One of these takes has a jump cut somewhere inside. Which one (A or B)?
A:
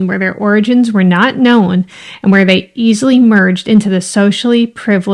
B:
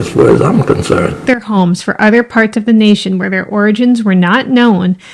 B